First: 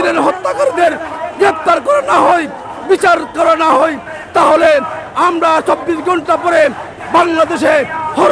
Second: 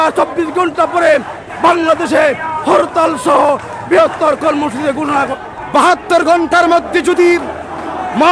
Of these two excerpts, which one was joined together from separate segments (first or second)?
second